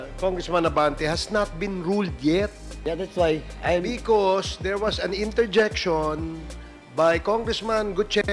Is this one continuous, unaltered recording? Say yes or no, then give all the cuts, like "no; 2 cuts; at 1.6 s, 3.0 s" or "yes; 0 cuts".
yes; 0 cuts